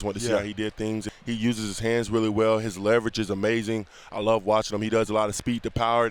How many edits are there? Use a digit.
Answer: 1